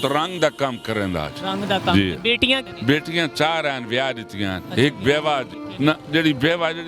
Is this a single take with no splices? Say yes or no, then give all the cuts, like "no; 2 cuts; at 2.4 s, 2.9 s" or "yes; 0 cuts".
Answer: no; 2 cuts; at 2.7 s, 5.6 s